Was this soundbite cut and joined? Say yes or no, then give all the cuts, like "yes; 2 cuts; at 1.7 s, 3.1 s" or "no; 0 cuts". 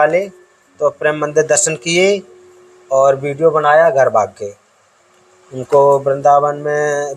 no; 0 cuts